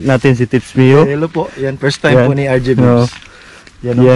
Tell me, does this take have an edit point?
no; 0 cuts

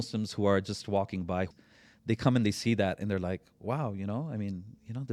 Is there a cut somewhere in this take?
yes; 1 cut; at 1.5 s

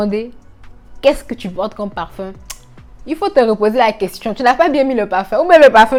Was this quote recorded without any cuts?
yes; 0 cuts

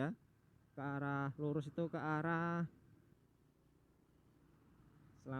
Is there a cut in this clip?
yes; 1 cut; at 3.1 s

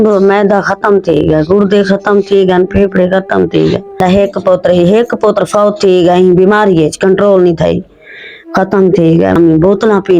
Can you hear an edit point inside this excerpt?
yes; 2 cuts; at 4.0 s, 9.4 s

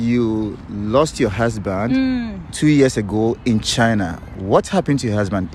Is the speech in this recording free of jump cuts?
yes; 0 cuts

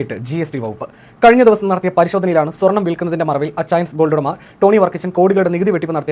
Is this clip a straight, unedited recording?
yes; 0 cuts

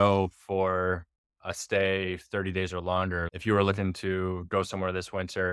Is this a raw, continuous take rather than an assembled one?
no; 1 cut; at 3.3 s

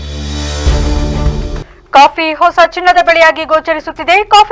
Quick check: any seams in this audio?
no; 0 cuts

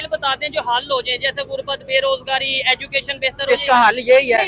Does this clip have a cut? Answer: no; 0 cuts

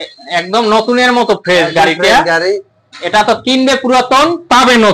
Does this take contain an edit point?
no; 0 cuts

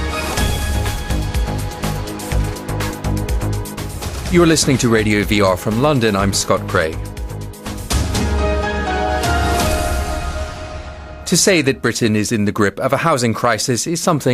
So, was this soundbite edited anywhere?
no; 0 cuts

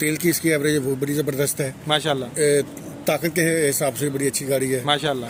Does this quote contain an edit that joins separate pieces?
no; 0 cuts

